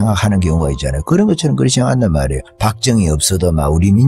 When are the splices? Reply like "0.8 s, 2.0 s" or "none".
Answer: 2.4 s